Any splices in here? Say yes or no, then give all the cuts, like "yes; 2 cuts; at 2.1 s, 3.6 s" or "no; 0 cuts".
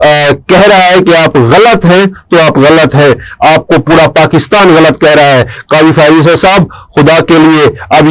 no; 0 cuts